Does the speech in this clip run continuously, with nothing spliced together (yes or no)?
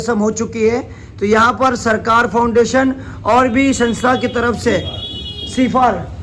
yes